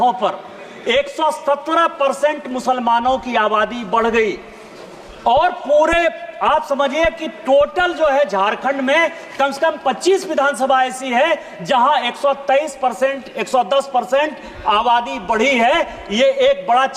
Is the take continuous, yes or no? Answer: yes